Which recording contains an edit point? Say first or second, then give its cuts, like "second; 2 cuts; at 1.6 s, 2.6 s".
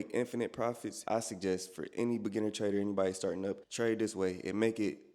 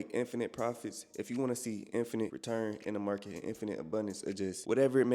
first; 2 cuts; at 0.9 s, 3.6 s